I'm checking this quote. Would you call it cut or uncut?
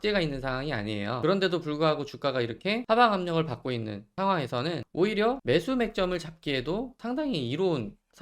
cut